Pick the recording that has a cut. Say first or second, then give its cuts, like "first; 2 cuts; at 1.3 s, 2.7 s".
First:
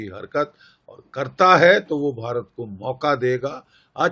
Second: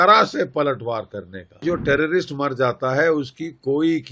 second; 1 cut; at 1.6 s